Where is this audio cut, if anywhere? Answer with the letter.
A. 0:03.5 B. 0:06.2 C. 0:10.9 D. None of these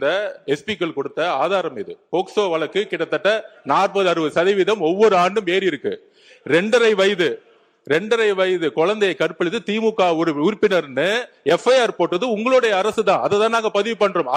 D